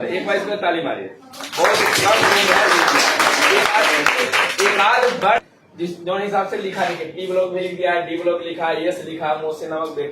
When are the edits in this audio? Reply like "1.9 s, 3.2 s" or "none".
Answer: 5.4 s